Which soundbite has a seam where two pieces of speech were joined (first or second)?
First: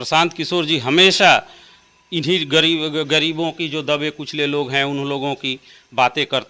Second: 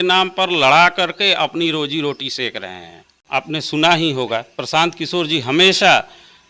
second